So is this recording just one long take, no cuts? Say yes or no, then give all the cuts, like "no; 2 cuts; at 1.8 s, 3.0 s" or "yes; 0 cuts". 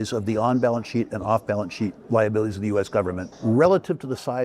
no; 1 cut; at 3.3 s